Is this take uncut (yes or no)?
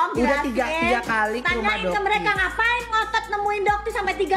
yes